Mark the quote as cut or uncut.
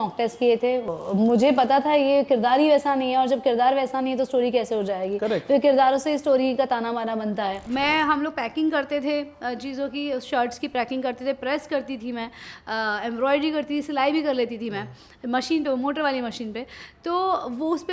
cut